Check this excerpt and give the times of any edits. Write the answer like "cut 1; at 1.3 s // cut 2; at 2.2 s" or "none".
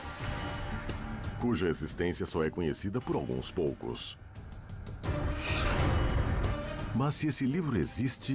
cut 1; at 6.1 s